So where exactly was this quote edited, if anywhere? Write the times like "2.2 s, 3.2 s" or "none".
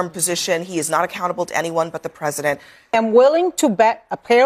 2.9 s